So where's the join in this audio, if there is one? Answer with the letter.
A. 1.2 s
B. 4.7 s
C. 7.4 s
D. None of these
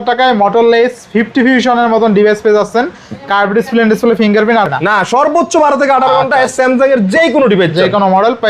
B